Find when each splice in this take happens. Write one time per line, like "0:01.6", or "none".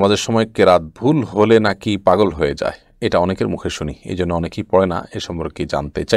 none